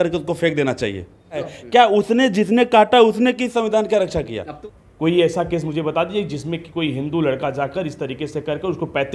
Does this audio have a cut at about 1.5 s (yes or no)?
yes